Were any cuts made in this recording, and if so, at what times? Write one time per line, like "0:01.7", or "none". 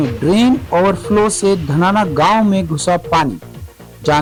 none